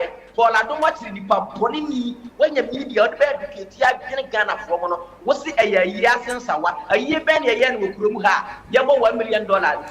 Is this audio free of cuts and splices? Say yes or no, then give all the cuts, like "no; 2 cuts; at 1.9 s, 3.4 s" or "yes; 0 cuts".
yes; 0 cuts